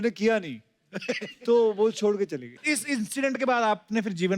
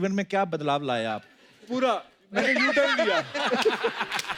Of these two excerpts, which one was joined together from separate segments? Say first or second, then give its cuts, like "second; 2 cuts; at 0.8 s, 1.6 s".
first; 1 cut; at 2.6 s